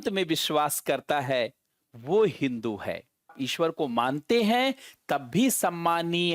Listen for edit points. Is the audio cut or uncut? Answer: cut